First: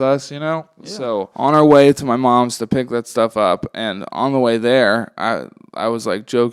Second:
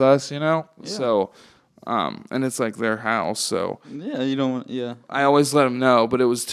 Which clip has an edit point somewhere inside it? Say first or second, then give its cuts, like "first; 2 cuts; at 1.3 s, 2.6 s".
first; 1 cut; at 1.3 s